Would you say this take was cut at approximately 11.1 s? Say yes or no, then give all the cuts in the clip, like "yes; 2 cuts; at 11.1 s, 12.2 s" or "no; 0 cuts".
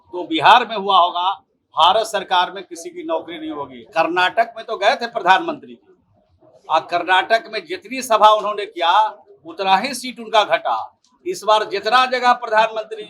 no; 1 cut; at 3.7 s